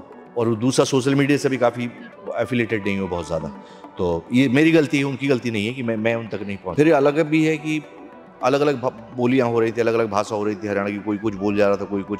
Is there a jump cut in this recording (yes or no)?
yes